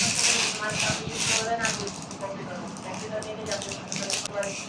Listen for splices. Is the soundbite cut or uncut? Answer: uncut